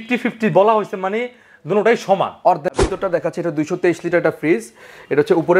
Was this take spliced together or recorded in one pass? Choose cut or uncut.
cut